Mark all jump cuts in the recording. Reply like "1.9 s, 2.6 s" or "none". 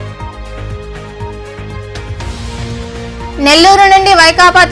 2.1 s